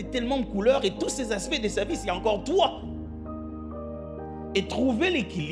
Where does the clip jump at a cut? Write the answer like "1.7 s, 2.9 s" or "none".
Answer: none